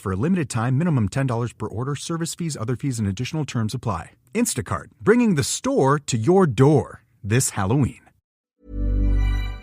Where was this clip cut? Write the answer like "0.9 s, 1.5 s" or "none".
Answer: 8.4 s

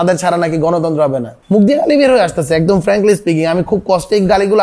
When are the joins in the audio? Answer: 1.3 s

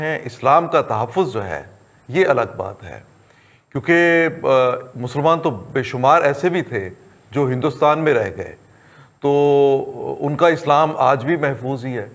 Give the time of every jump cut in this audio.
none

